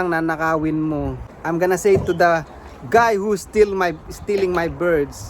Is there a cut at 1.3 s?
yes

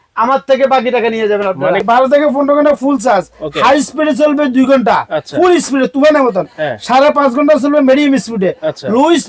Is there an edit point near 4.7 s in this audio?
no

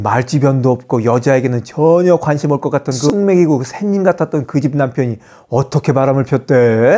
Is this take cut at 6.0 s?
no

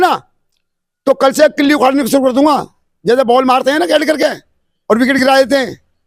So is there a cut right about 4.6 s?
no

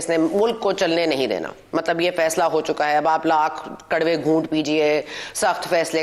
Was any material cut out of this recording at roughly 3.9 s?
no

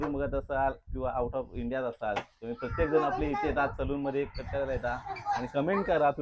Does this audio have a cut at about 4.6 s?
no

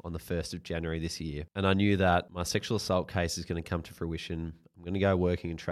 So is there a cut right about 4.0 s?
no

